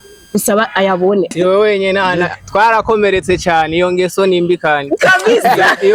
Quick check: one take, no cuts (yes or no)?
no